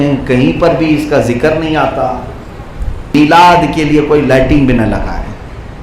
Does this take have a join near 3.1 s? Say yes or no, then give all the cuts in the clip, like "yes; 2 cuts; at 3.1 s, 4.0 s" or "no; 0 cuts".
yes; 1 cut; at 3.1 s